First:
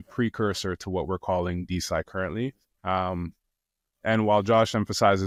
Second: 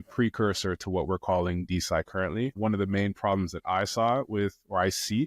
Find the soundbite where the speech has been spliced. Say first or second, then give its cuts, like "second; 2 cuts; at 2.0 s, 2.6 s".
second; 1 cut; at 2.5 s